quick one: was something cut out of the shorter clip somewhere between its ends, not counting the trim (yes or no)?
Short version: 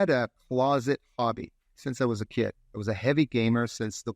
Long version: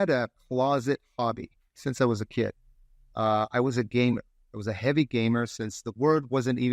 yes